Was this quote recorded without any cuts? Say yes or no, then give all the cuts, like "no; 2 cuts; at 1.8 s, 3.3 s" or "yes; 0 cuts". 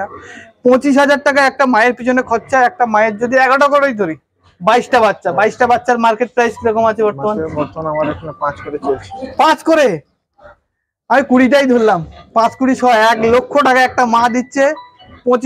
yes; 0 cuts